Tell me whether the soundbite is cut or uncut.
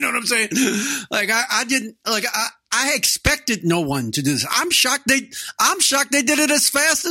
uncut